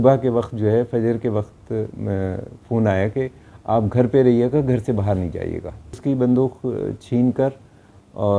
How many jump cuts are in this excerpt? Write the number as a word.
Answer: one